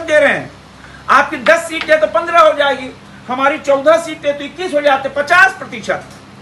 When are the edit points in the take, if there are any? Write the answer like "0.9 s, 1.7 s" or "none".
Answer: none

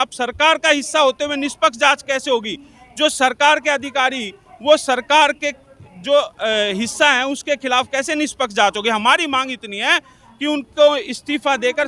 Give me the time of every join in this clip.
none

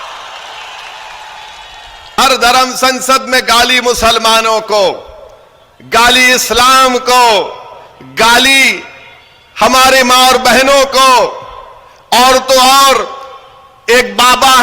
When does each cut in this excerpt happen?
2.2 s

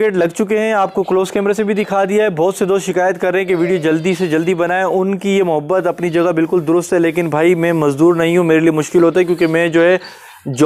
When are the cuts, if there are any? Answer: none

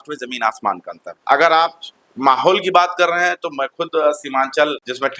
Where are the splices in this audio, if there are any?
none

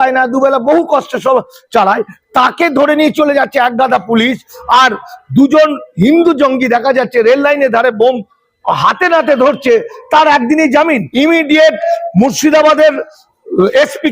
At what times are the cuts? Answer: 11.1 s

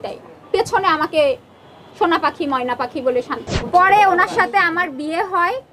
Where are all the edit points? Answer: 3.4 s

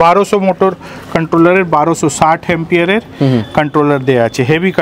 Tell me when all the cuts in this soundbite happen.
none

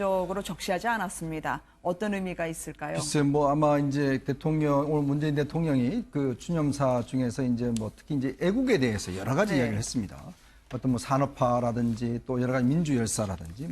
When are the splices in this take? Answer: 9.5 s

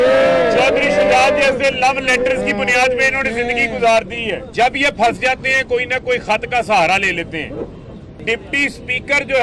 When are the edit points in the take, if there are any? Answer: 4.5 s, 8.2 s

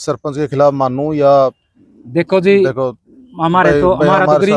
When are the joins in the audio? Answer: none

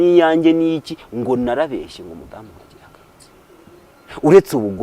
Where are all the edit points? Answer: 3.9 s

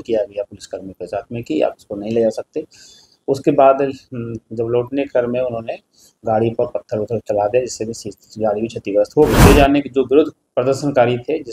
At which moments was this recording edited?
9.4 s

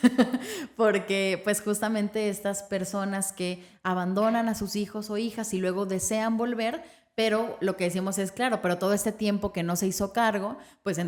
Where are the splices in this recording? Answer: none

